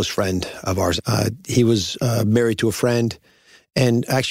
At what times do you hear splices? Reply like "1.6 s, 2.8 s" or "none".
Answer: 1.0 s